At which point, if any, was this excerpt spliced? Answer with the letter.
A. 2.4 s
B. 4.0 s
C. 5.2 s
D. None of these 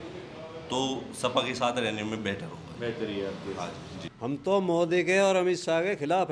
B